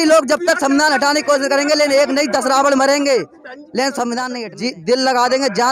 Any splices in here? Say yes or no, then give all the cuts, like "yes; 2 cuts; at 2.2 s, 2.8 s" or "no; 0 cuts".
yes; 1 cut; at 4.4 s